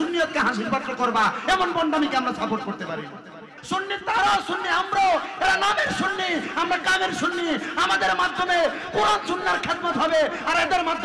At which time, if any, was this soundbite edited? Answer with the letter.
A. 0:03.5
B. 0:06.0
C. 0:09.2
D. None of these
A